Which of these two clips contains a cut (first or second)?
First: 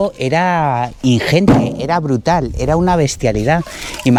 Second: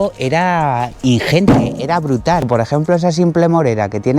second